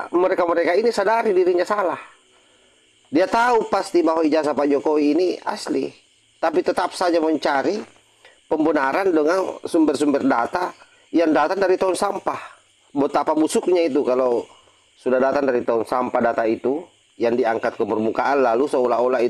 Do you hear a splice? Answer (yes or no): no